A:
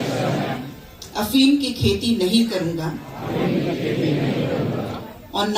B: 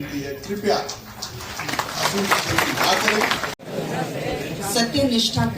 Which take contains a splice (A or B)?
B